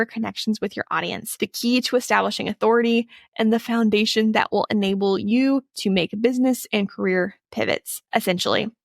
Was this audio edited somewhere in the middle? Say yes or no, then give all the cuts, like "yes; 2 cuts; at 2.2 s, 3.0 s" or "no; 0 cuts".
yes; 2 cuts; at 1.2 s, 7.9 s